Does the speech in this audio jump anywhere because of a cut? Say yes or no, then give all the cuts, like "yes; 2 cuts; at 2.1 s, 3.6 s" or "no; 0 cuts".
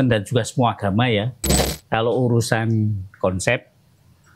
yes; 1 cut; at 1.7 s